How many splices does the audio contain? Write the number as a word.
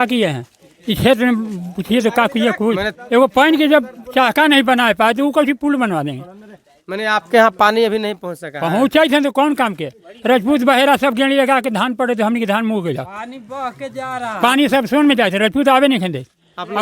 one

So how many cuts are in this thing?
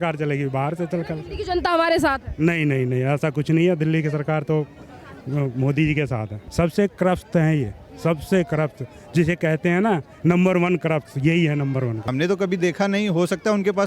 two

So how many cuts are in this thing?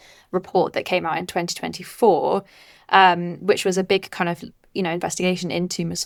zero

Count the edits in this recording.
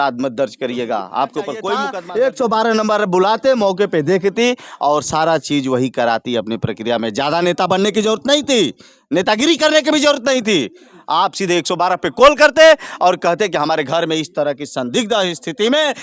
one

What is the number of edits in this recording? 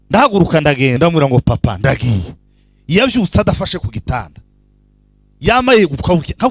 one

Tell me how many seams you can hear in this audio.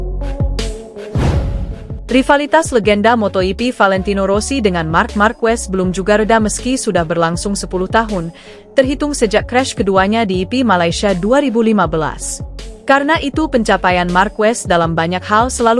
one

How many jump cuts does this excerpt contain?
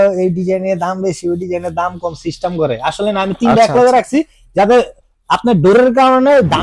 zero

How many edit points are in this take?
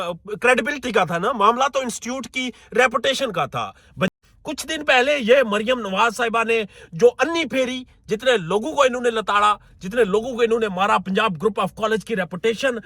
one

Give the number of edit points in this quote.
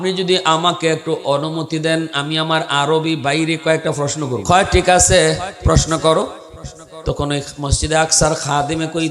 one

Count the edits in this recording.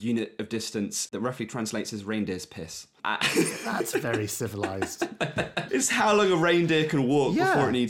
three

